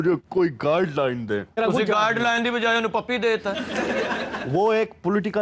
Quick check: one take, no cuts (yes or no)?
yes